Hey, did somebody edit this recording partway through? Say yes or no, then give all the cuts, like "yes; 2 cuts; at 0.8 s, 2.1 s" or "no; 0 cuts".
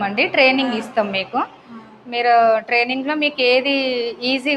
no; 0 cuts